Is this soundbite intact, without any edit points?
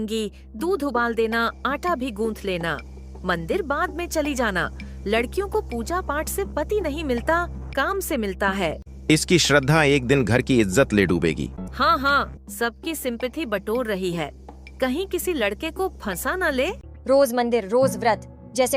no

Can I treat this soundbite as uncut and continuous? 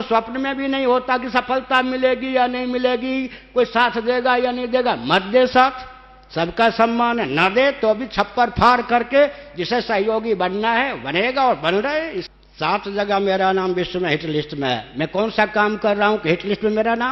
no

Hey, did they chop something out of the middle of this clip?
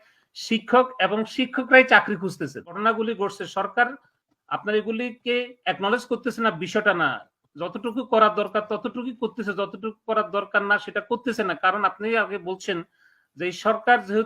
yes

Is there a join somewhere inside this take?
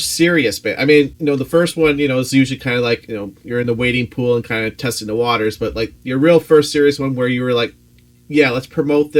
yes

